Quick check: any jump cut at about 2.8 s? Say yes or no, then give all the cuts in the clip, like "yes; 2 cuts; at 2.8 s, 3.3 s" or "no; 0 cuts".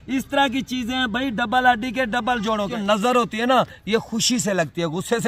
yes; 1 cut; at 2.8 s